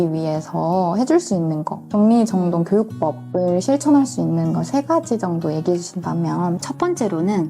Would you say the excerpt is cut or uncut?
cut